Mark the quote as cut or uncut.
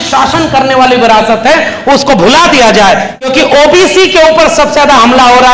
cut